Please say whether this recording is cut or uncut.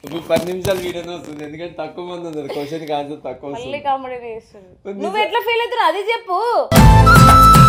uncut